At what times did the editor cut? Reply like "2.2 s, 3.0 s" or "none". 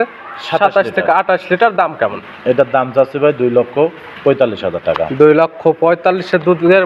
none

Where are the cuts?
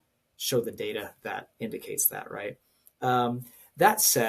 none

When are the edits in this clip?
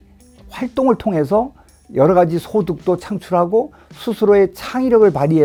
none

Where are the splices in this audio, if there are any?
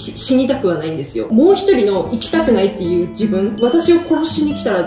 1.3 s, 3.5 s

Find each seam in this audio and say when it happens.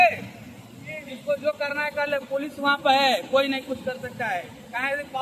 none

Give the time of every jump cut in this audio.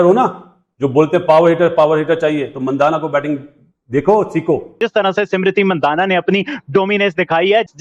4.8 s

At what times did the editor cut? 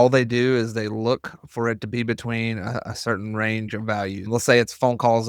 4.3 s

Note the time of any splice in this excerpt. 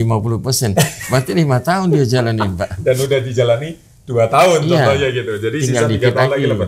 none

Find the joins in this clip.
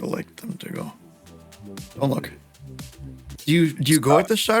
3.2 s

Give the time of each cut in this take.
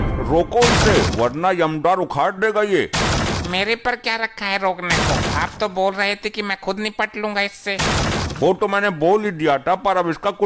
none

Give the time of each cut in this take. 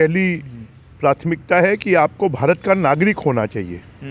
none

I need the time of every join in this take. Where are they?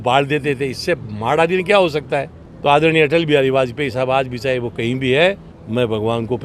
none

